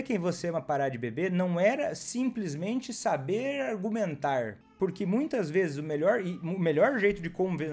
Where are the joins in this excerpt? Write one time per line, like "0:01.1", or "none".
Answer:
0:04.6